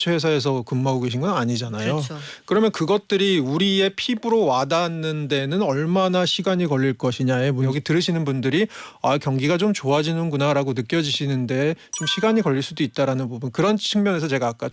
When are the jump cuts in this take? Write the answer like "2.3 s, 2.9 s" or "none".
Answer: 7.7 s

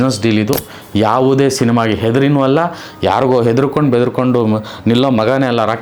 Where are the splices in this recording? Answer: none

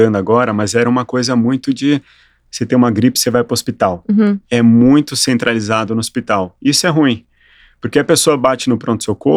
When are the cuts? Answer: none

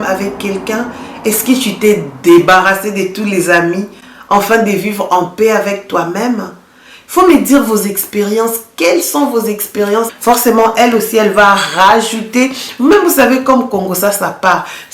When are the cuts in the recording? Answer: 10.1 s

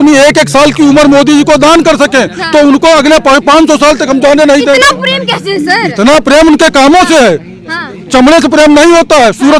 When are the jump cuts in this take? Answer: none

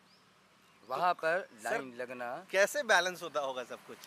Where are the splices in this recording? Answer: none

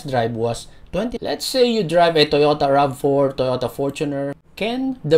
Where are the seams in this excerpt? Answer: 1.1 s, 4.3 s

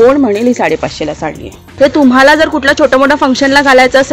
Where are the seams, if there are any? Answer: 1.7 s

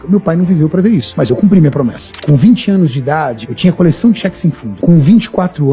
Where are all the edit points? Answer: 1.1 s, 2.1 s, 3.4 s, 4.7 s

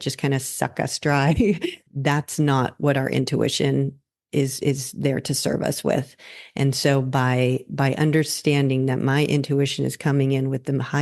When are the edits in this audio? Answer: 1.9 s

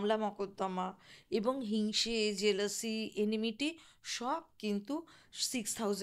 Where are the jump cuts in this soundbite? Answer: none

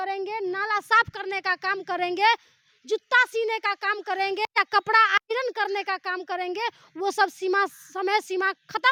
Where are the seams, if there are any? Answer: none

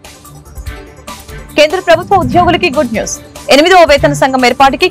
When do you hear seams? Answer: 1.1 s

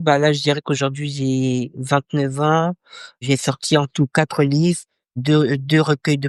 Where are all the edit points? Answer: none

